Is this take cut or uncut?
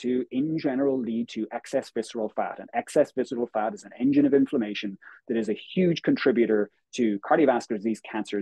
uncut